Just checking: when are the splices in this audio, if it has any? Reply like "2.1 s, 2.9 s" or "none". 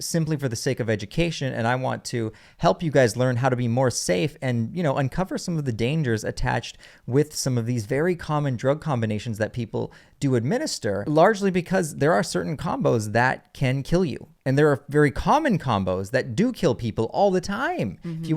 11.0 s, 14.3 s